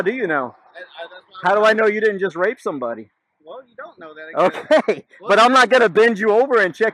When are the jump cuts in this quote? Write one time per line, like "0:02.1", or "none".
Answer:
none